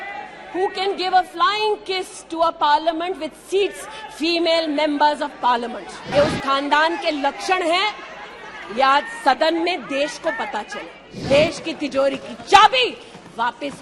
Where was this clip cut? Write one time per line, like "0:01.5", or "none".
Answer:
0:06.0
0:11.1